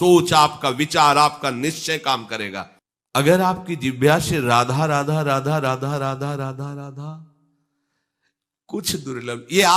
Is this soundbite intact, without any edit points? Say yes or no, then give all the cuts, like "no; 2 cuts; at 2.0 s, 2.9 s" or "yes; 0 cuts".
no; 1 cut; at 2.7 s